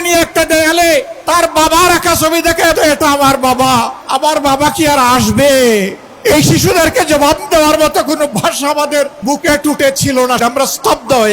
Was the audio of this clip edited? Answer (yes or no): yes